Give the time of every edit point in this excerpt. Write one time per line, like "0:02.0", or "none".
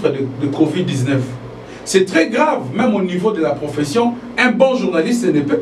none